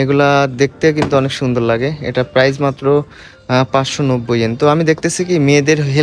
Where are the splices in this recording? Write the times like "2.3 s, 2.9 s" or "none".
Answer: none